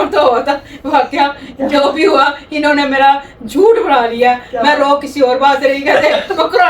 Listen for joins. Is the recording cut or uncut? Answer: uncut